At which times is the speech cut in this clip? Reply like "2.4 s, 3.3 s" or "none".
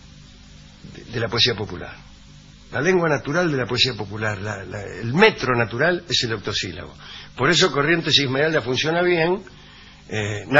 6.1 s